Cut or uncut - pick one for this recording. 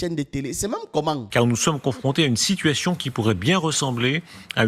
cut